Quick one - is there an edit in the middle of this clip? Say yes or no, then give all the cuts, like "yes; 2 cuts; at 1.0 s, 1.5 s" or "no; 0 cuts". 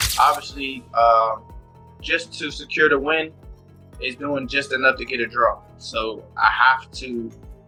no; 0 cuts